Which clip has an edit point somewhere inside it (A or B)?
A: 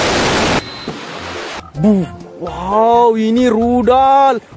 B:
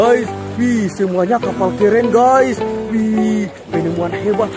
A